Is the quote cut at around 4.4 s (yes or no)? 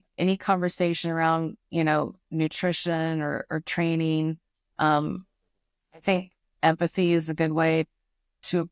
no